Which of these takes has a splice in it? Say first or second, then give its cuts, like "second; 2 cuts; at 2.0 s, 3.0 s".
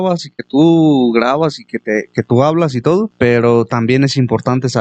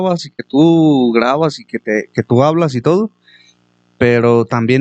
first; 1 cut; at 3.1 s